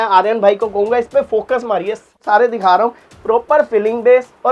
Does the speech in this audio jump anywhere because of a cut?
yes; 1 cut; at 2.2 s

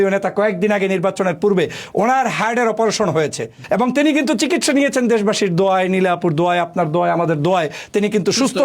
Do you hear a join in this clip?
yes; 1 cut; at 3.6 s

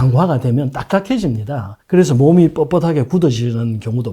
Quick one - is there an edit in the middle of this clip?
no; 0 cuts

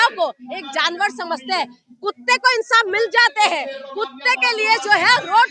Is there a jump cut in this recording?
no; 0 cuts

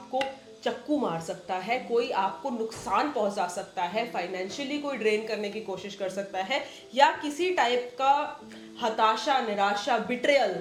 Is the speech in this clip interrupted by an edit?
no; 0 cuts

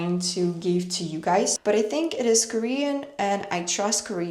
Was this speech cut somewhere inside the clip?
yes; 1 cut; at 1.6 s

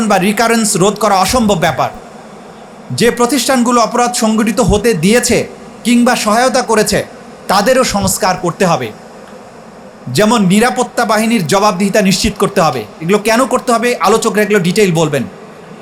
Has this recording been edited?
no; 0 cuts

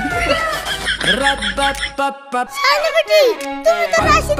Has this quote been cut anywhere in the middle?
yes; 1 cut; at 2.5 s

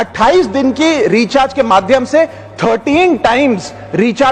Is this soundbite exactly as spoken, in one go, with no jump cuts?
yes; 0 cuts

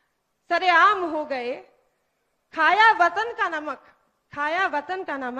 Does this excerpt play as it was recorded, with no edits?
yes; 0 cuts

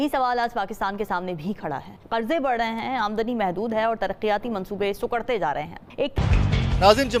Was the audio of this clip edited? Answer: no; 0 cuts

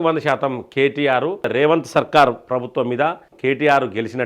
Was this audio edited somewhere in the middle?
yes; 2 cuts; at 1.5 s, 3.3 s

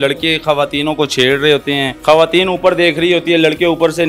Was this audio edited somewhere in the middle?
yes; 1 cut; at 1.9 s

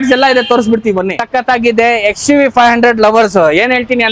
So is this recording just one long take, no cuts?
no; 1 cut; at 1.3 s

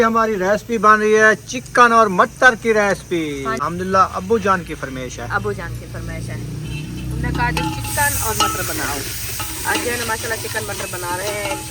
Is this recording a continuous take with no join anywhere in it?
no; 1 cut; at 3.6 s

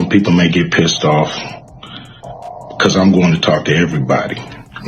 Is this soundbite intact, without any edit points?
yes; 0 cuts

